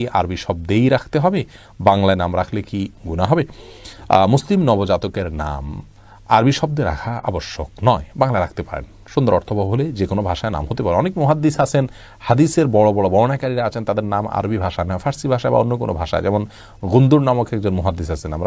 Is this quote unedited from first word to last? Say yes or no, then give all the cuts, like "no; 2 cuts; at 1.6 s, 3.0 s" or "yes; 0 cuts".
yes; 0 cuts